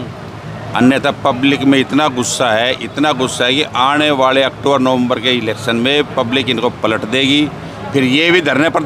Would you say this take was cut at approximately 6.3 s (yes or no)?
no